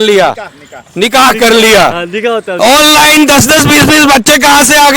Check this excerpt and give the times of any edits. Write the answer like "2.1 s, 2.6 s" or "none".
none